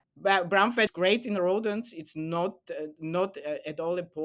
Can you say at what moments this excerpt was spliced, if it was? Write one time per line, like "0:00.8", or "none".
0:00.9